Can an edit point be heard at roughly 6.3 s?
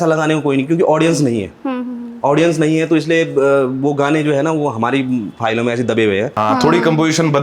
yes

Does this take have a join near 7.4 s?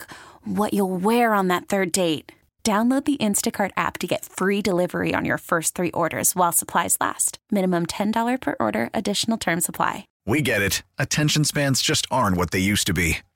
no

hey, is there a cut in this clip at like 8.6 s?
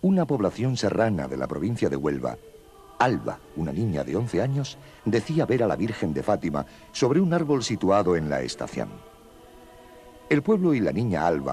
yes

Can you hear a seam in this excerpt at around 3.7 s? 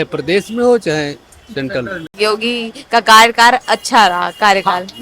no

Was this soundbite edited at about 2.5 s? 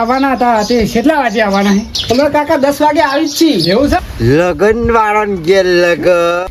no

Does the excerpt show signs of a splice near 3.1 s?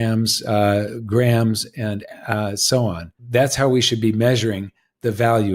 yes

